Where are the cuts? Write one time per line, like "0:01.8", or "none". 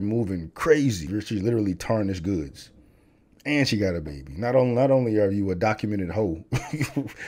0:01.1